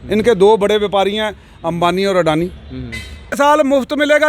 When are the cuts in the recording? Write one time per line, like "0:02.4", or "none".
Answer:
0:03.4